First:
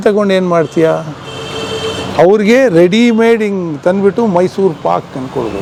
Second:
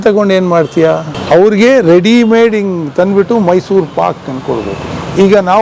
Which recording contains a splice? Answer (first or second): second